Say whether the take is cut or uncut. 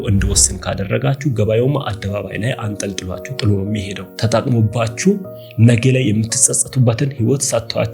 uncut